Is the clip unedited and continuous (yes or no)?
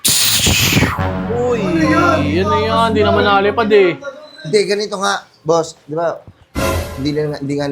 yes